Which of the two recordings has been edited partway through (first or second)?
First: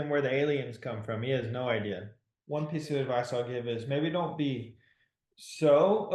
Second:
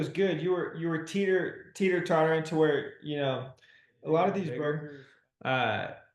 second